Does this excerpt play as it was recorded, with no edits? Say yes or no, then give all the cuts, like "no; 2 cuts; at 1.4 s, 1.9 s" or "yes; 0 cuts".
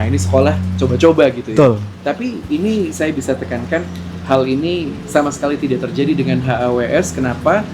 yes; 0 cuts